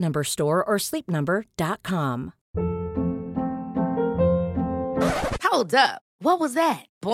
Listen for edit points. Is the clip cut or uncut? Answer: cut